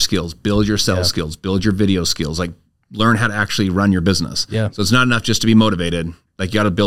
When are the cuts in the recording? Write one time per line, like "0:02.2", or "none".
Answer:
none

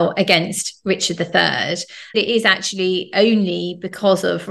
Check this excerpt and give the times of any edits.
0:02.1

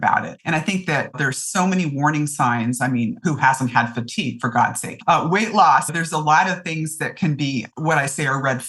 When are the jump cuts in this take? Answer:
0:04.9
0:05.9

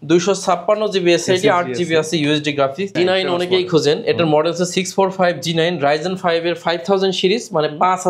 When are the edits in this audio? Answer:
0:03.0

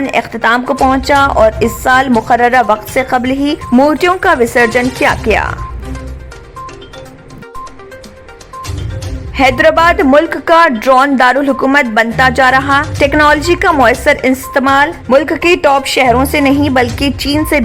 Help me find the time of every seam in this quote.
none

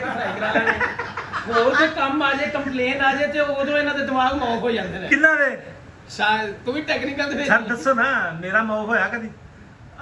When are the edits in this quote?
none

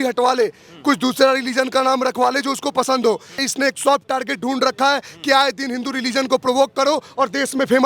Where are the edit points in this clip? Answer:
0:03.4

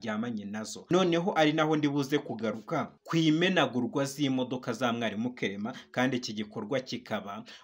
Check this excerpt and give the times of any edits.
0:00.9
0:03.0

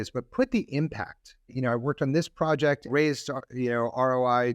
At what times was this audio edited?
0:01.5
0:02.9

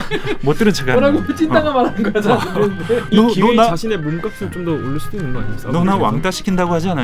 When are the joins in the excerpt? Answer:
none

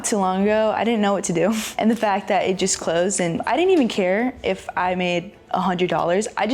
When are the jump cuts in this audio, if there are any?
0:00.8
0:01.7
0:03.4

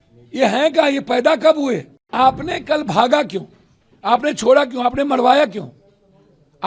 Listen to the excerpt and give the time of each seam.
0:02.1

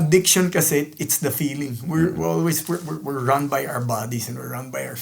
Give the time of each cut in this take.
none

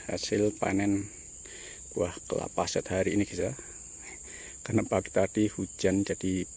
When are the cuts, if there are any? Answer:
none

